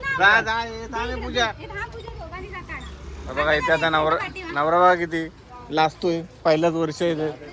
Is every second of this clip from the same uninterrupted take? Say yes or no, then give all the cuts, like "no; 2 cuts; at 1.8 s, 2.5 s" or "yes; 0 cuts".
yes; 0 cuts